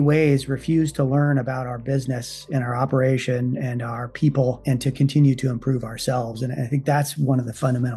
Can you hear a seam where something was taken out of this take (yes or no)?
no